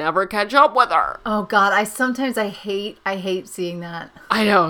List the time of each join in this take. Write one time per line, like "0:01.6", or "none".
none

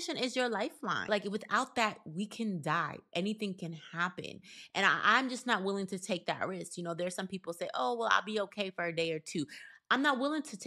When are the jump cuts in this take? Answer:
0:01.1

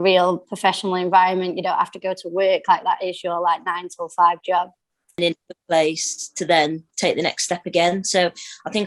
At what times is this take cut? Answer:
0:05.2

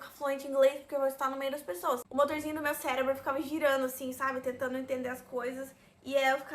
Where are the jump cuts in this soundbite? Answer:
0:02.1

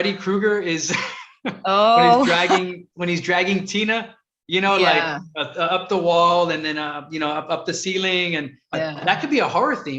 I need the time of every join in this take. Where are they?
0:08.7

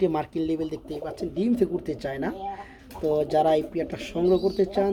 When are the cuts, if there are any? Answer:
none

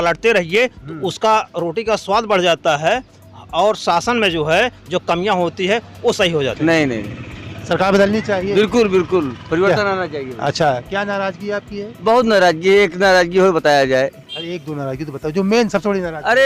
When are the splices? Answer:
0:06.6

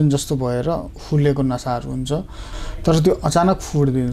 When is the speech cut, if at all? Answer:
0:02.5

